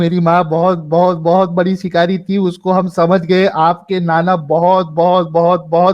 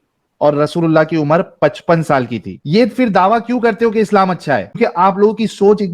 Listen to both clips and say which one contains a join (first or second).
second